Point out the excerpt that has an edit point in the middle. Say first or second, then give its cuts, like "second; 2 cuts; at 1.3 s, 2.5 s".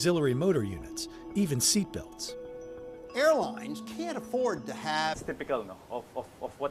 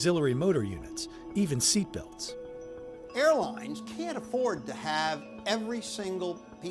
second; 1 cut; at 5.2 s